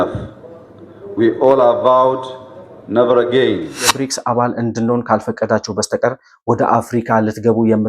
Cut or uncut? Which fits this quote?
cut